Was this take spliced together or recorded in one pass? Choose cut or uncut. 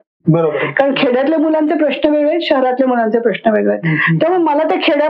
uncut